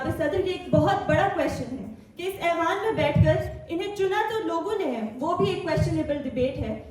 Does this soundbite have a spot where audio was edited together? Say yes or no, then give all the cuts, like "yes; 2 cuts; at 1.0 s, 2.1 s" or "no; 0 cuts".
no; 0 cuts